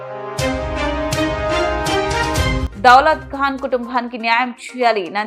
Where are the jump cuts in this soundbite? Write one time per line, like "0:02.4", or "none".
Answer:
0:02.6